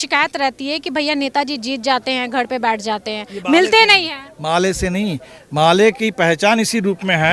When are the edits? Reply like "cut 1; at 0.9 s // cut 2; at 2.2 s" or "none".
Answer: none

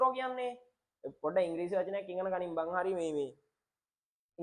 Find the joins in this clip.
none

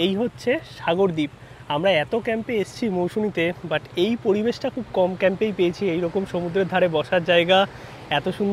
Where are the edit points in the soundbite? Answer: none

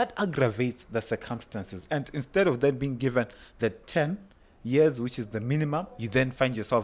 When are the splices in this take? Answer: none

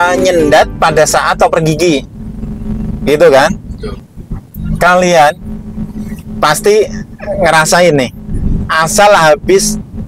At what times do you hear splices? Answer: cut 1; at 4.1 s

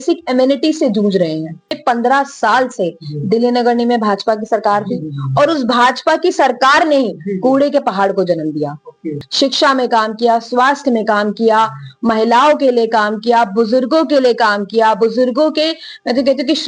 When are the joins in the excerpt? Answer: cut 1; at 1.8 s // cut 2; at 9.2 s

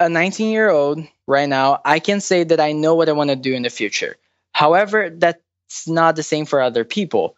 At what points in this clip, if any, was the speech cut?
cut 1; at 1.1 s

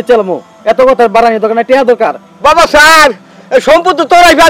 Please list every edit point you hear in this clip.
cut 1; at 2.3 s

